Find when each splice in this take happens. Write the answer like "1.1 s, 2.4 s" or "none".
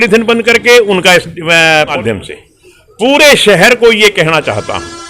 1.9 s